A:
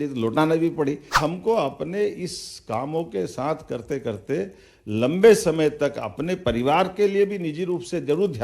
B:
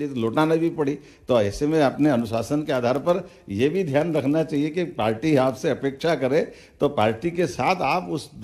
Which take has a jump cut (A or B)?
A